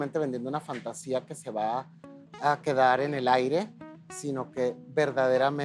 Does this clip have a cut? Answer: no; 0 cuts

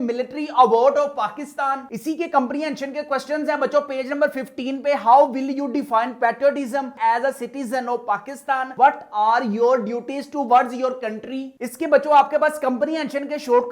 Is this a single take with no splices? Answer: no; 2 cuts; at 6.9 s, 11.5 s

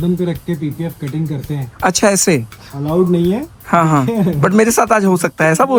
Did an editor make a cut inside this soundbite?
no; 0 cuts

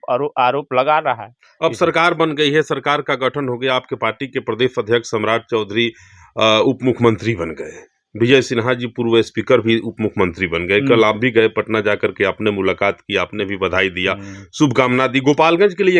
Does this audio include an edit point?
no; 0 cuts

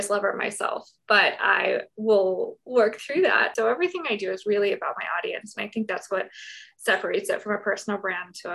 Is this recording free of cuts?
no; 2 cuts; at 0.9 s, 3.5 s

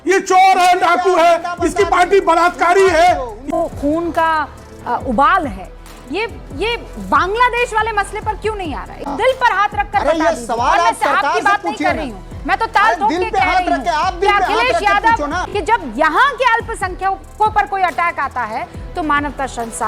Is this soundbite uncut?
no; 3 cuts; at 3.5 s, 9.2 s, 15.4 s

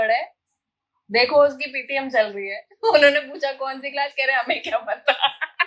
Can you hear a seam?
no; 0 cuts

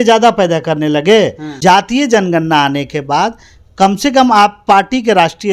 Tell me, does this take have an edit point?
yes; 1 cut; at 1.4 s

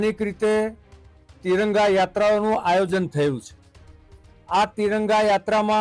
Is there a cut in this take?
no; 0 cuts

